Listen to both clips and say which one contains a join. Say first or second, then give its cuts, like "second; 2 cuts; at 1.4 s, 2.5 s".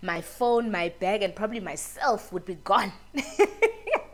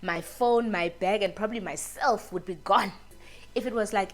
second; 1 cut; at 3.2 s